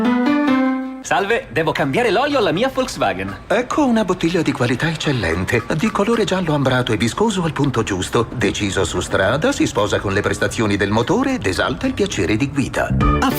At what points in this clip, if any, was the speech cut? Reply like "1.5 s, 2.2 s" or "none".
0.9 s